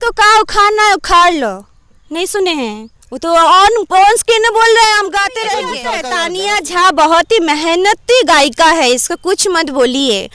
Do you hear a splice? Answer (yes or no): yes